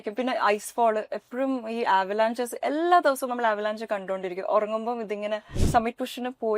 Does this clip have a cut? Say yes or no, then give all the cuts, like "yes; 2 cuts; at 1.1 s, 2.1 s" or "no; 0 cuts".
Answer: yes; 1 cut; at 5.6 s